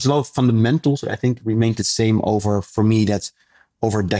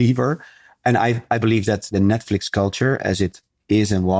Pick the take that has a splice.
second; 1 cut; at 1.8 s

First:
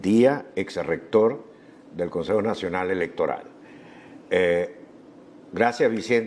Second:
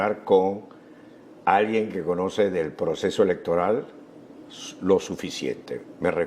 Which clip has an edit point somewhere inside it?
second; 1 cut; at 3.0 s

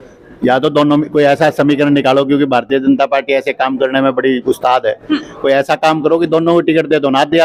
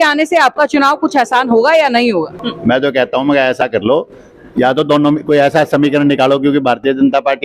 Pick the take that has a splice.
second; 1 cut; at 2.4 s

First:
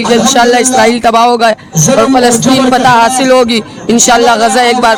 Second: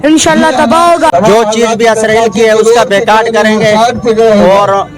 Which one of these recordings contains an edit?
second; 1 cut; at 1.1 s

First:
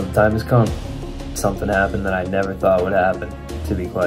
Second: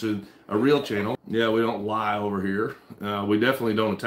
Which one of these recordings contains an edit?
second; 1 cut; at 1.2 s

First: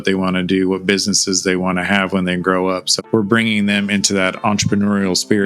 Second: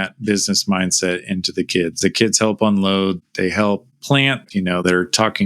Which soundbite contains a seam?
second; 2 cuts; at 2.0 s, 4.4 s

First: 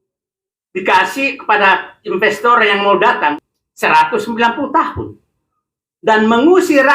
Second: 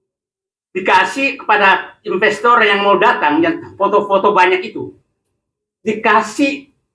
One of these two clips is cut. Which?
first; 1 cut; at 3.3 s

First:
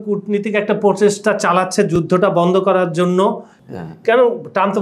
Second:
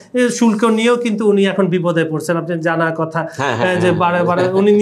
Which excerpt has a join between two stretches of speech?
first; 1 cut; at 3.5 s

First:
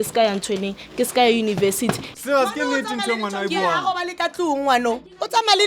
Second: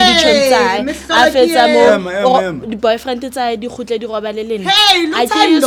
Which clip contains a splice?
first; 1 cut; at 2.1 s

